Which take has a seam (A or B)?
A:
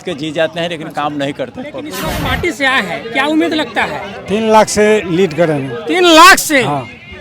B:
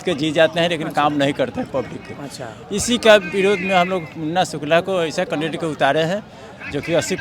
A